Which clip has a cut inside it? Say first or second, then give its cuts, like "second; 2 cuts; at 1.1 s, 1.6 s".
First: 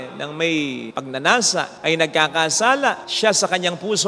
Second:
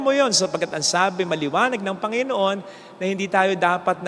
first; 3 cuts; at 0.9 s, 1.7 s, 3.1 s